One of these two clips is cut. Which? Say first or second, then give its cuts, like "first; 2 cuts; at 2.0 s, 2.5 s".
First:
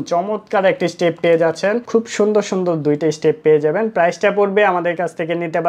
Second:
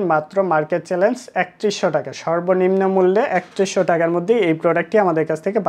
first; 1 cut; at 1.8 s